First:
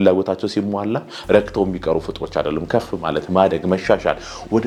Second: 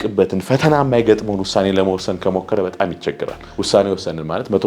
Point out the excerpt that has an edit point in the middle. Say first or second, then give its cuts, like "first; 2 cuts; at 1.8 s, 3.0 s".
second; 1 cut; at 3.5 s